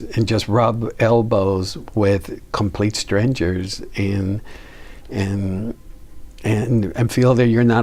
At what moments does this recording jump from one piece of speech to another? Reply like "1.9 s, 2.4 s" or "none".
none